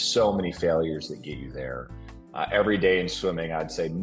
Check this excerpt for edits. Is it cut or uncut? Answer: uncut